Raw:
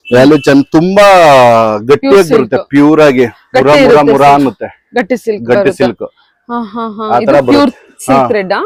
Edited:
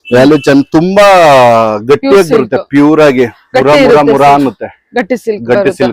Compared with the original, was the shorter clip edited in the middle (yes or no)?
no